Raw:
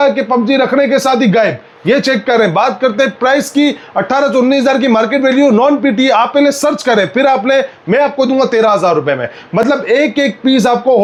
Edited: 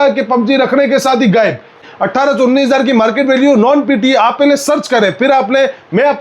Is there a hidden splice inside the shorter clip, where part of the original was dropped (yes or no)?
yes